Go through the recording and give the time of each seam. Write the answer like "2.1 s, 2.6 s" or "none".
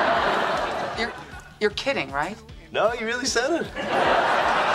none